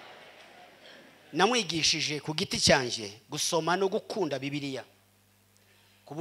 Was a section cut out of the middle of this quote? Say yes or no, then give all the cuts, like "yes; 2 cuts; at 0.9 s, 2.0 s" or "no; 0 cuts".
yes; 1 cut; at 1.2 s